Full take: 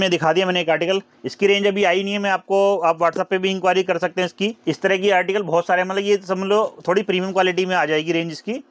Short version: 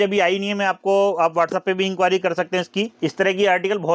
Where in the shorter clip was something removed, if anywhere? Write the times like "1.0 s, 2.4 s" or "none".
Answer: none

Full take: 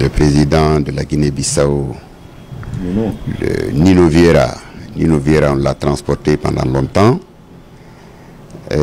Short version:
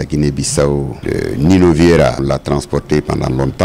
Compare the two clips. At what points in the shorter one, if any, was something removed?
1.0 s, 2.2 s

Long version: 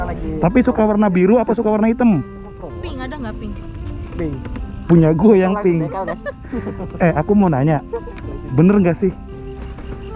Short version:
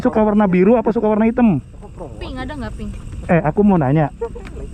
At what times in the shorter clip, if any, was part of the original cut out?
3.1 s

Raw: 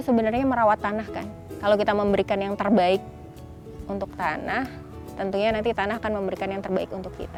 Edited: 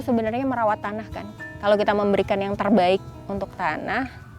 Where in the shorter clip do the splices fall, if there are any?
3.1 s

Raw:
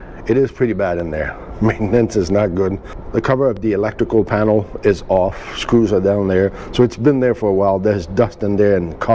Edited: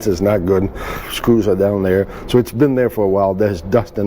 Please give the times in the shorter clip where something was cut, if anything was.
0.9 s

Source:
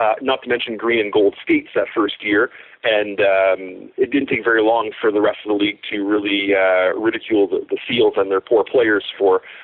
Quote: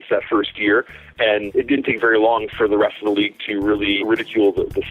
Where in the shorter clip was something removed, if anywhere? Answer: 1.5 s, 4.0 s

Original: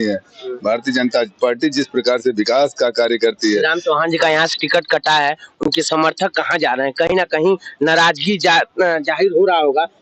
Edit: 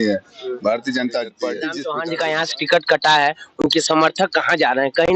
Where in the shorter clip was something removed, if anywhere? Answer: 1.8 s

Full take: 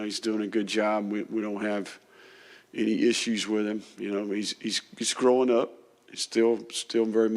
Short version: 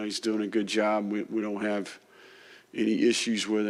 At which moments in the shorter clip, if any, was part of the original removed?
none

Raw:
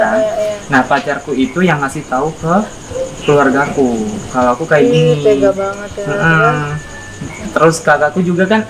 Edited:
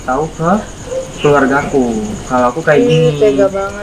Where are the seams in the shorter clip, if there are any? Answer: none

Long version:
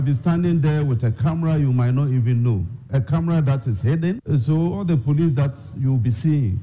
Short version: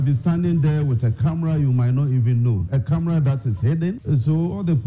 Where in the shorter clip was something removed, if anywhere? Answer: 2.6 s

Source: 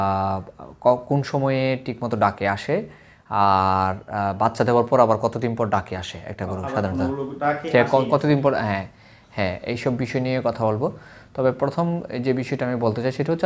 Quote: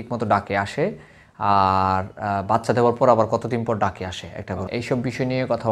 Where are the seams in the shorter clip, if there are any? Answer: 4.7 s

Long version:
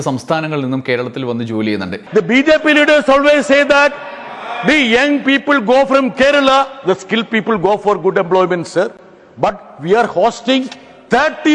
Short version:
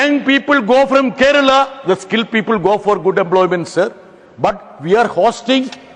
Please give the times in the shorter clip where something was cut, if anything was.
none

